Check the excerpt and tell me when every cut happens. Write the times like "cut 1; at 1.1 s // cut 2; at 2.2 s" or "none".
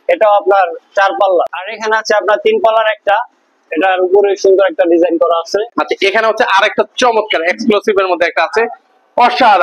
cut 1; at 1.6 s // cut 2; at 5.7 s